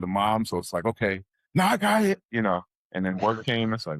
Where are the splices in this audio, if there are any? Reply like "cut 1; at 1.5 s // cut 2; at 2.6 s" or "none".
none